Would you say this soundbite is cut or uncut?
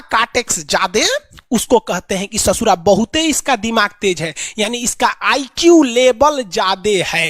uncut